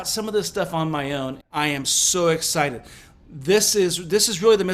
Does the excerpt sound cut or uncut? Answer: cut